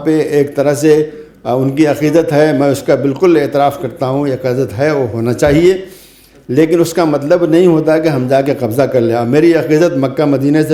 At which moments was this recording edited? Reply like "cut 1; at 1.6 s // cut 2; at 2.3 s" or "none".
none